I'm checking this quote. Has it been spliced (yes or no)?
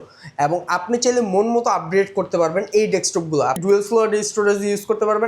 yes